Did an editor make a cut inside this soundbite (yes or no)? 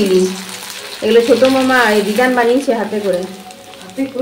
no